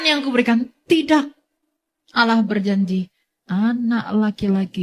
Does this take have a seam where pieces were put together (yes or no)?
no